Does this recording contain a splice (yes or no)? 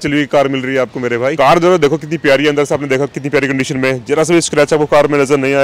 no